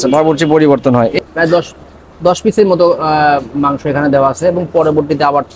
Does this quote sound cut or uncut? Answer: cut